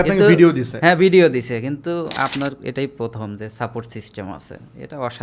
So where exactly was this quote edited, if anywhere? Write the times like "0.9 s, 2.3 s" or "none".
none